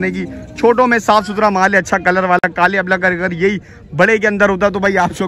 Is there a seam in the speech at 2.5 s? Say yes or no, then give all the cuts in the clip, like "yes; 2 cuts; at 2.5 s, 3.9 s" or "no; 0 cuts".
no; 0 cuts